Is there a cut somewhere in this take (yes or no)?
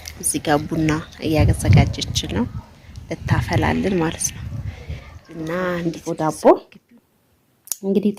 yes